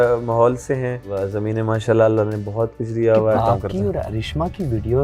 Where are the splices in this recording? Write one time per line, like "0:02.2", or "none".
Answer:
0:01.1
0:03.4